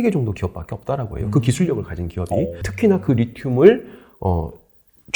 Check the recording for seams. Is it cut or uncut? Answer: cut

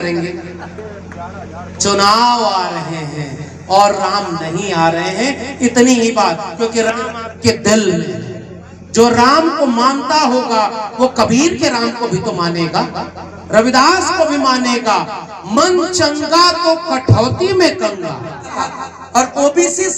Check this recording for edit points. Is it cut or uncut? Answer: cut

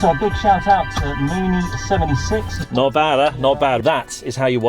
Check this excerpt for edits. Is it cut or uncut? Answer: cut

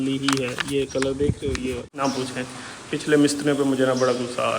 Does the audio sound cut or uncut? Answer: cut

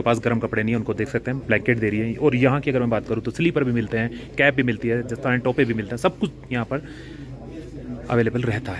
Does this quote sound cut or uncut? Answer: uncut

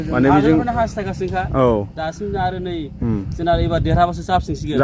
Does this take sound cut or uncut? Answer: uncut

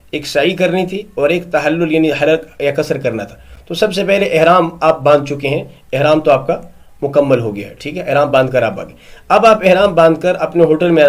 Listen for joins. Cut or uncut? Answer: uncut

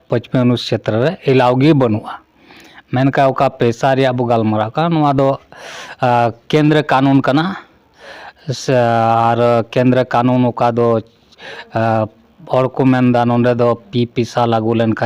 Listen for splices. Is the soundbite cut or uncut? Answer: uncut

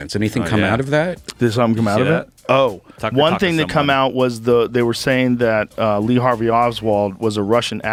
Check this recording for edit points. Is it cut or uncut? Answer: uncut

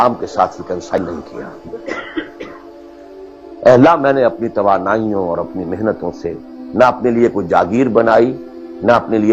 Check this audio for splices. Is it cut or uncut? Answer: cut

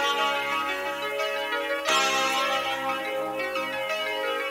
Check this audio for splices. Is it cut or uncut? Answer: uncut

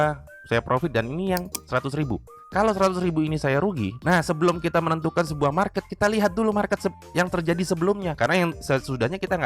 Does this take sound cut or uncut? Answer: cut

